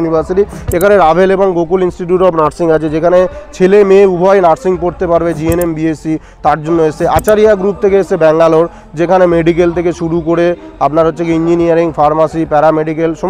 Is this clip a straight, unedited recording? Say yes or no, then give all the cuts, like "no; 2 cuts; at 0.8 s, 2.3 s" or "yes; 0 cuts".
yes; 0 cuts